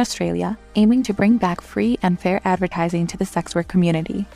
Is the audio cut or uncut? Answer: uncut